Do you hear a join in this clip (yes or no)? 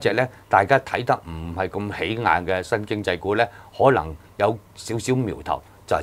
no